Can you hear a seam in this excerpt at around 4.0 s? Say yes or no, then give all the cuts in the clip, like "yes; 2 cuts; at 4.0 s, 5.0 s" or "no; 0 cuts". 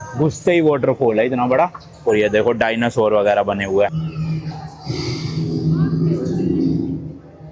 yes; 1 cut; at 4.0 s